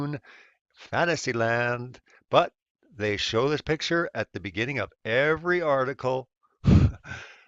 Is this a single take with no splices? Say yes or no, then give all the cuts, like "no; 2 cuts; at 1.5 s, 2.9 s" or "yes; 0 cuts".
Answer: no; 1 cut; at 1.5 s